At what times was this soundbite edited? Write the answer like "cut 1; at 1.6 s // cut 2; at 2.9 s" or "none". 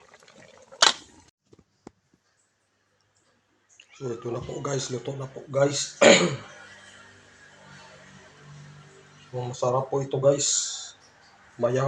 cut 1; at 1.3 s